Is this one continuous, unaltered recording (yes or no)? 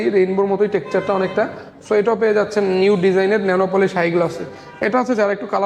yes